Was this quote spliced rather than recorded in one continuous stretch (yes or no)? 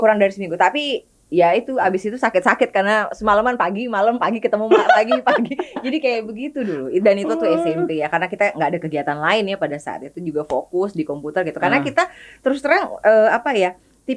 no